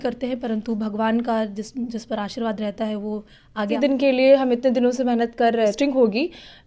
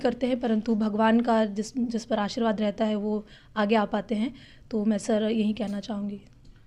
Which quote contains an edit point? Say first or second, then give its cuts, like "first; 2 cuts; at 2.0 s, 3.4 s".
first; 2 cuts; at 3.7 s, 5.7 s